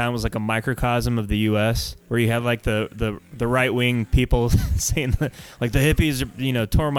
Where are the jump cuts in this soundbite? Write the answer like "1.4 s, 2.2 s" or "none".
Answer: 1.9 s